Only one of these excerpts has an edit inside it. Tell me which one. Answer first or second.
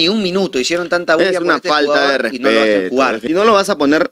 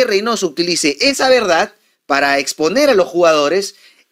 first